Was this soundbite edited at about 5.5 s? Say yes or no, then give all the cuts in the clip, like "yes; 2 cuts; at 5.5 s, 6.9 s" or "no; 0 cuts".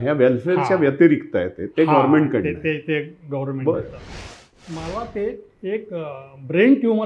yes; 2 cuts; at 4.4 s, 5.5 s